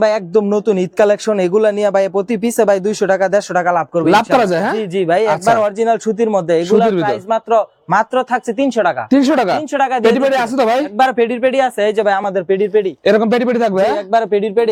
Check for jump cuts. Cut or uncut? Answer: uncut